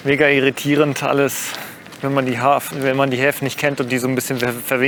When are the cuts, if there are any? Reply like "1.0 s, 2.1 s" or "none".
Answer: none